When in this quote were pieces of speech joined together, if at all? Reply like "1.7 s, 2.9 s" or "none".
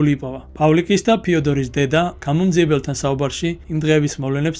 2.2 s, 3.6 s